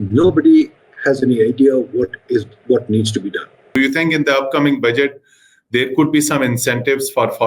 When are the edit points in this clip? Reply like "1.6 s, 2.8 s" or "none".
3.8 s